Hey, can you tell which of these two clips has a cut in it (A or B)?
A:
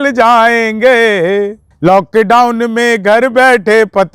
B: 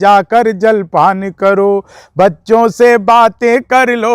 A